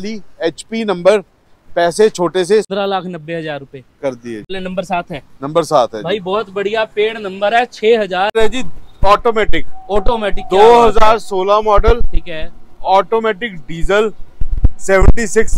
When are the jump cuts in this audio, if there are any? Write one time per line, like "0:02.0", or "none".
0:02.7
0:04.4
0:08.3